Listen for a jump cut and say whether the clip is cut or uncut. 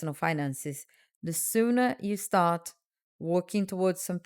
uncut